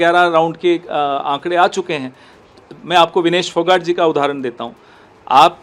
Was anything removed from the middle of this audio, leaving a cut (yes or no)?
no